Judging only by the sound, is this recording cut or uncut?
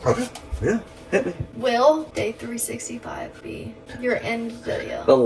cut